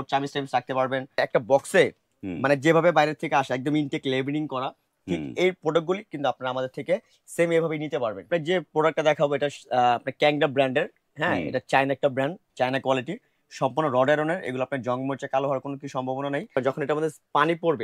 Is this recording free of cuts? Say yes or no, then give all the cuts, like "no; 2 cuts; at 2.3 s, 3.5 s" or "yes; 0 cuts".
no; 4 cuts; at 1.2 s, 8.3 s, 12.4 s, 16.5 s